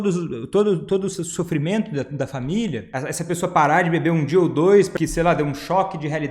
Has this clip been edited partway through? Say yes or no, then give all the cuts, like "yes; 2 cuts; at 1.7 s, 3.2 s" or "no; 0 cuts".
yes; 2 cuts; at 2.9 s, 4.9 s